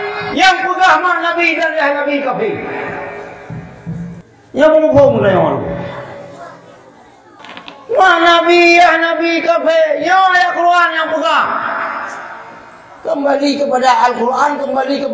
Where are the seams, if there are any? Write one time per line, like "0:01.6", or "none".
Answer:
0:04.2
0:07.4